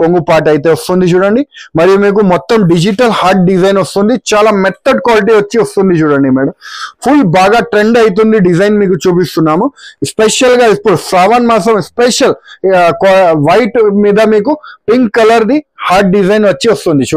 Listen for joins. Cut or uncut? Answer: uncut